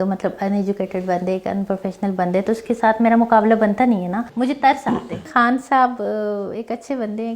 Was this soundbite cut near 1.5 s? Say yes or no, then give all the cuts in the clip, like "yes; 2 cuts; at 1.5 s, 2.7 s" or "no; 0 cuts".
no; 2 cuts; at 4.2 s, 5.3 s